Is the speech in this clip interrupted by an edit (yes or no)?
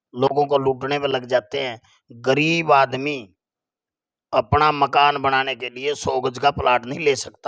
no